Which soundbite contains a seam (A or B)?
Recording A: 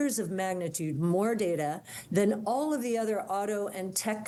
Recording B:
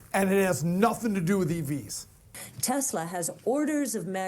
B